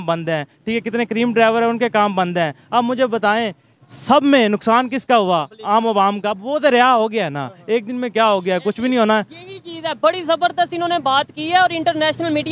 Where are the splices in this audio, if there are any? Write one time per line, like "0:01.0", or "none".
none